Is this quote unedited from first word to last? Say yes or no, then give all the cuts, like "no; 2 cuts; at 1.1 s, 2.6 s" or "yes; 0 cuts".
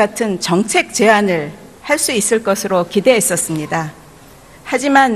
no; 1 cut; at 2.6 s